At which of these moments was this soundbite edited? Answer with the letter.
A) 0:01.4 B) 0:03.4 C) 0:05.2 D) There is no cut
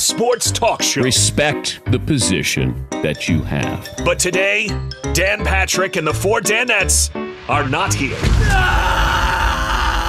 D